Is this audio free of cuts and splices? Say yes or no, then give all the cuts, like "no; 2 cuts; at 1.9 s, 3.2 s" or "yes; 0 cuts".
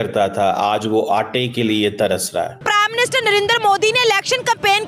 no; 1 cut; at 2.6 s